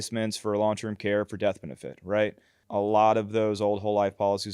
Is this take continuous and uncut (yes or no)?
no